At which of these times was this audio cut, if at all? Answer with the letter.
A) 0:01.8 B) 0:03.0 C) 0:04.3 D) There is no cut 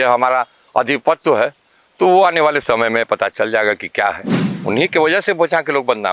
C